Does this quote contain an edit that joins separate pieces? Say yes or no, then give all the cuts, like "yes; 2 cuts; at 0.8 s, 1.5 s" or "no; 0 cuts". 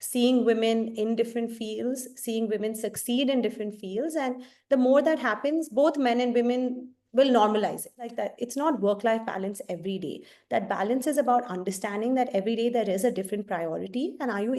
yes; 1 cut; at 8.1 s